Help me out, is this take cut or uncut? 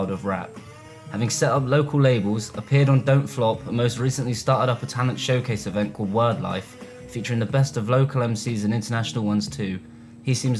cut